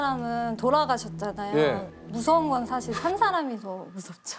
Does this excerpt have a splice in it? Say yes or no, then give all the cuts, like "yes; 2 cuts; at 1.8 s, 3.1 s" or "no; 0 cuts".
no; 0 cuts